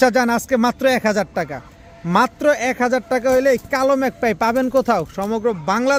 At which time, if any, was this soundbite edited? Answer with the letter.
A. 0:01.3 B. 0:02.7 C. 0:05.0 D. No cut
D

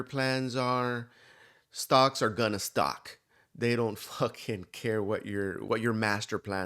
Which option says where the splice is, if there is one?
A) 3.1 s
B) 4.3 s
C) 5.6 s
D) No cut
C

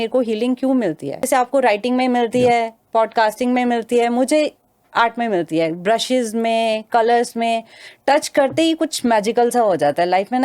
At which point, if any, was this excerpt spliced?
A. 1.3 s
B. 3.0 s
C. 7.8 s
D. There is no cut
A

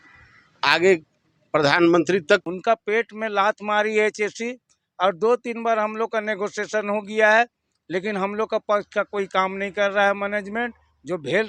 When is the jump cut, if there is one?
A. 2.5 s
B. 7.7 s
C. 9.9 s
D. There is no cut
A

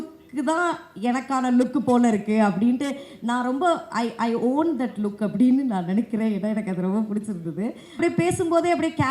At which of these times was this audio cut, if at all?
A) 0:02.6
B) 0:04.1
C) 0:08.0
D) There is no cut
C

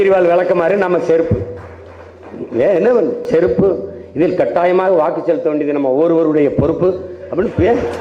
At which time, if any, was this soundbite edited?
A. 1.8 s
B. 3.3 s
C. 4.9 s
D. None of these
B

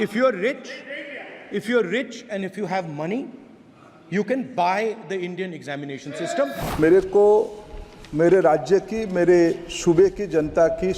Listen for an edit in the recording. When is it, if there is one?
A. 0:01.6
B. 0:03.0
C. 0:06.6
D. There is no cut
C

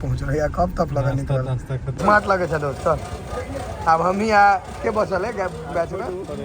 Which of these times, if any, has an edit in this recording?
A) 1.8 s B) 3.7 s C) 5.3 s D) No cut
A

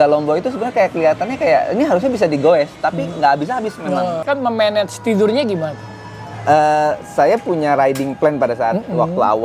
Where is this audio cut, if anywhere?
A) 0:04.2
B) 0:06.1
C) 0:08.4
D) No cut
A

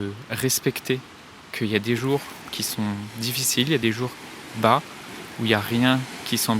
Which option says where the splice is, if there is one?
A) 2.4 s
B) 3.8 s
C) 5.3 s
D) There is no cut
B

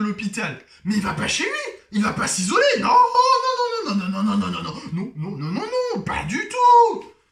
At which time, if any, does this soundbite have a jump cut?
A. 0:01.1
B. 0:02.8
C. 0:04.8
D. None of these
D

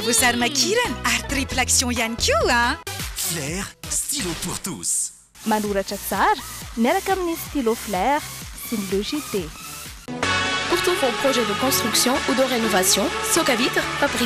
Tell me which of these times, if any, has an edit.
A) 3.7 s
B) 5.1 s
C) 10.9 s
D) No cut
D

